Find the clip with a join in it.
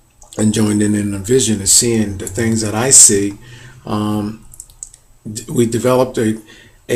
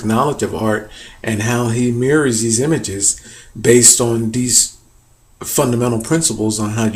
second; 1 cut; at 4.1 s

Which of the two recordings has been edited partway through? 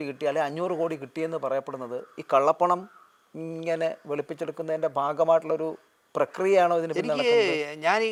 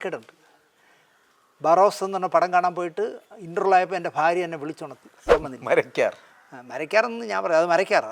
second; 1 cut; at 5.3 s

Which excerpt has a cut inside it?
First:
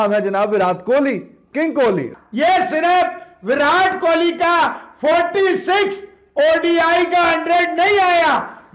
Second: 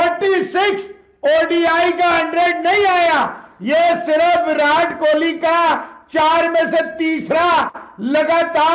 first; 1 cut; at 2.1 s

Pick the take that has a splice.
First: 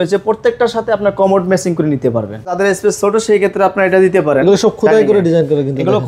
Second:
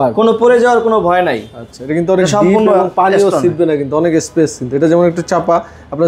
first; 1 cut; at 2.5 s

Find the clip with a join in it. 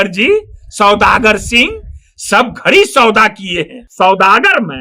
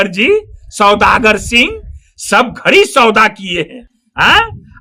first; 1 cut; at 3.8 s

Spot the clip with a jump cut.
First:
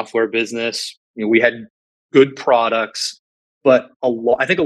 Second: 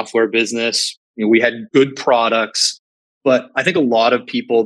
second; 2 cuts; at 1.6 s, 3.6 s

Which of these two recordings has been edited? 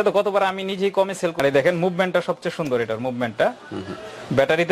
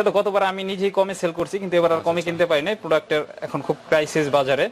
first; 1 cut; at 1.4 s

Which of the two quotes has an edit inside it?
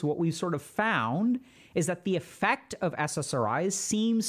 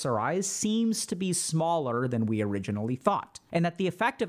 second; 1 cut; at 3.3 s

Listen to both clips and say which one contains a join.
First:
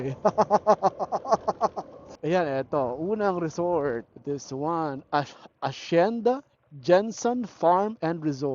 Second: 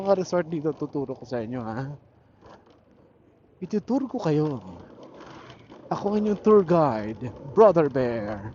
first; 2 cuts; at 2.0 s, 4.1 s

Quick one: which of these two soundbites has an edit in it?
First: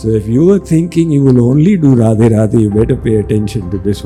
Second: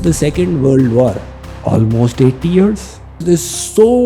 second; 2 cuts; at 1.3 s, 3.2 s

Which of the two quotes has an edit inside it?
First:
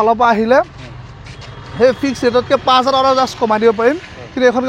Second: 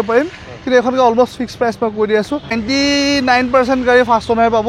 second; 1 cut; at 2.6 s

